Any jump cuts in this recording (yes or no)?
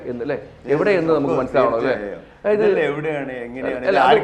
no